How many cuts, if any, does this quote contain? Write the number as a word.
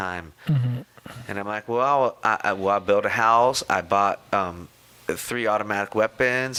zero